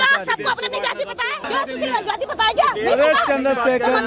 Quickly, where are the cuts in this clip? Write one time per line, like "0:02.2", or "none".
0:01.5